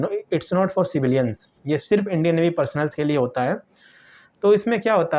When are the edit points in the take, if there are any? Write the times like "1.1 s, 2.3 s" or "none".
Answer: none